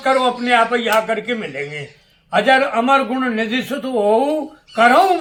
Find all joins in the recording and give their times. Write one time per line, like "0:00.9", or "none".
none